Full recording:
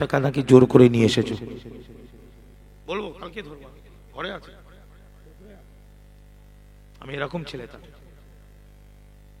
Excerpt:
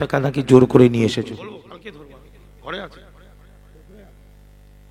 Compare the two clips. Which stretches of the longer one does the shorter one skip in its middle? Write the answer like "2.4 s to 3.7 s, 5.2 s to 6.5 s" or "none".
1.6 s to 3.1 s